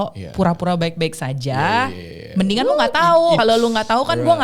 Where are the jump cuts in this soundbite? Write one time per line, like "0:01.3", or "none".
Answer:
0:03.4